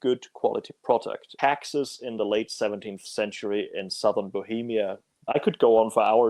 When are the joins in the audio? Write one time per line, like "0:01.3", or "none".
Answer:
0:01.2
0:05.3